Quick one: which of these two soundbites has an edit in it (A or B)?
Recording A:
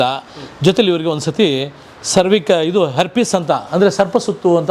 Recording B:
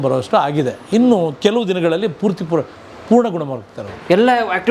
A